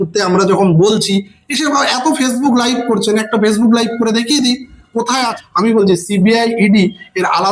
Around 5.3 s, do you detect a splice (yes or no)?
yes